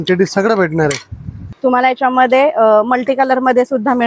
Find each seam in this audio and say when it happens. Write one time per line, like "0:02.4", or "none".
0:01.4